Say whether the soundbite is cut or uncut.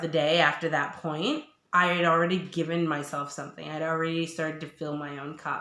uncut